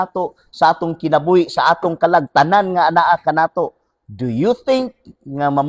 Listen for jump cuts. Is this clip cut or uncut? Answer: uncut